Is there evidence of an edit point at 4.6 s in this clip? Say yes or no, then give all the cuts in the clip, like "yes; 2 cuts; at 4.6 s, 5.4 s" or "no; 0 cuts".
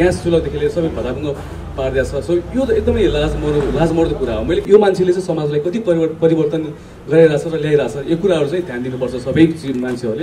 yes; 1 cut; at 4.6 s